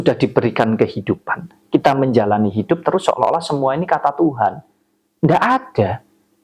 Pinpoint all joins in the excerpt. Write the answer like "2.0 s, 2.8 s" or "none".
none